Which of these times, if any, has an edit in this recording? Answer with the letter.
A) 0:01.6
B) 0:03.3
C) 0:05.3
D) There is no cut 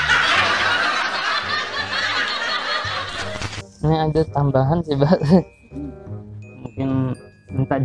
B